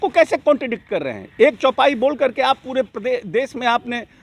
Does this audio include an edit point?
no; 0 cuts

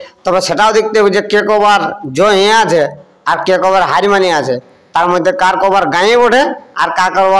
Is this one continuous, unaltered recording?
yes; 0 cuts

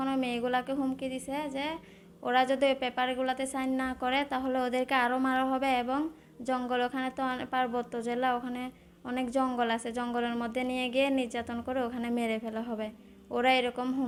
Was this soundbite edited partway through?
no; 0 cuts

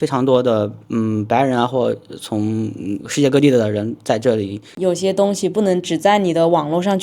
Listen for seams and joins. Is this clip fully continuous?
no; 1 cut; at 4.6 s

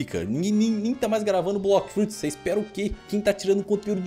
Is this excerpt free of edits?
yes; 0 cuts

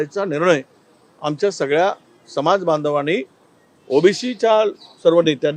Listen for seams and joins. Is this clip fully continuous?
yes; 0 cuts

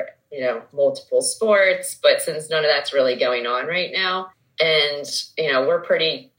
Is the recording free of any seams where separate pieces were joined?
no; 1 cut; at 4.4 s

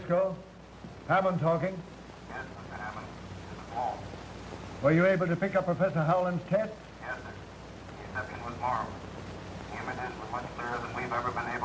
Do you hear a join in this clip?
no; 0 cuts

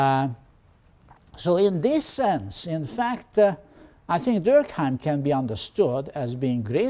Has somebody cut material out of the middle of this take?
no; 0 cuts

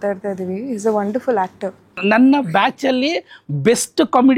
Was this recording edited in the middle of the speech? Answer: yes; 1 cut; at 1.9 s

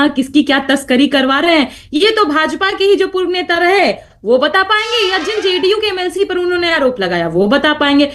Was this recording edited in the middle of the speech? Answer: no; 0 cuts

